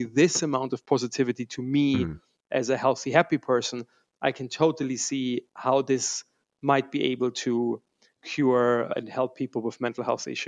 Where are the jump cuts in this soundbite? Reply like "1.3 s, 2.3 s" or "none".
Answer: 8.9 s